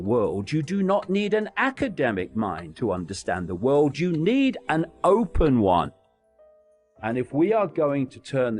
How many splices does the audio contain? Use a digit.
1